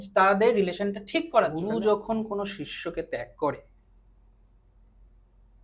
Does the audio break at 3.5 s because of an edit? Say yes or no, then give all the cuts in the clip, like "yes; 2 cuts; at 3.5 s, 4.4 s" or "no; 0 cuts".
no; 1 cut; at 1.4 s